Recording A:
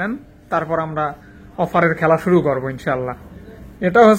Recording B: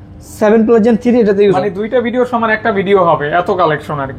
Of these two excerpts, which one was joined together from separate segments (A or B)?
B